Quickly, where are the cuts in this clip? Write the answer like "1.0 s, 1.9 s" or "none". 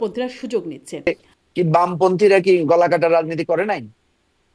1.1 s